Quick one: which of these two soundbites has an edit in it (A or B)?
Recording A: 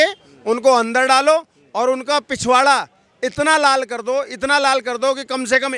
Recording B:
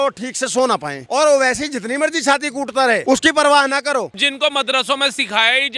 B